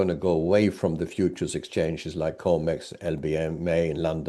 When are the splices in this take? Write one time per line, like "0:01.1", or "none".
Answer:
none